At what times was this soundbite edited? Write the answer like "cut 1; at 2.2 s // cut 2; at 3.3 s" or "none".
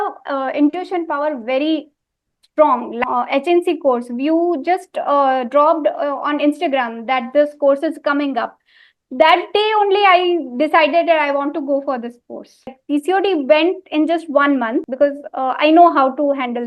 cut 1; at 2.9 s // cut 2; at 12.8 s // cut 3; at 14.9 s